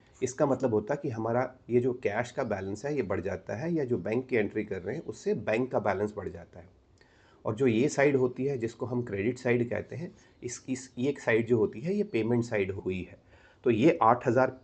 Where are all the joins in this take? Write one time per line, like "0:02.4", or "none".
0:12.8